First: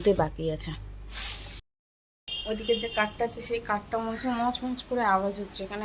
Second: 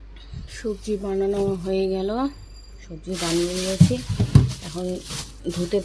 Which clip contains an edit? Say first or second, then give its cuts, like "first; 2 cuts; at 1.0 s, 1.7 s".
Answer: first; 1 cut; at 1.6 s